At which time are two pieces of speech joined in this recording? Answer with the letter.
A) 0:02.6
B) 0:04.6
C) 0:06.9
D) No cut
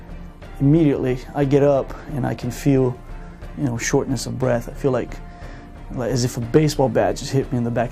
D